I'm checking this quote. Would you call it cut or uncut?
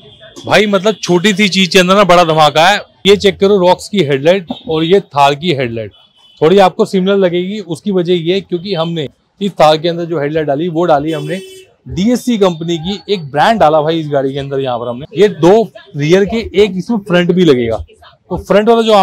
cut